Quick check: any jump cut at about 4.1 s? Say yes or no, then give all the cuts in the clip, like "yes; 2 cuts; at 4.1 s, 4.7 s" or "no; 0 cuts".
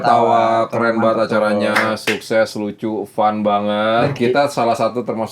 yes; 1 cut; at 4.1 s